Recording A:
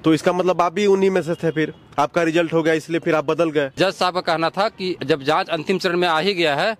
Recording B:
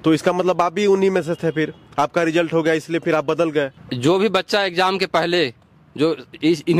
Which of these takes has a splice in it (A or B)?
A